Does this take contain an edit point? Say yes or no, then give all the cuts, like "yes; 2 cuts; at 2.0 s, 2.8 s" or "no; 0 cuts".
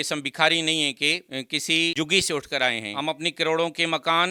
no; 0 cuts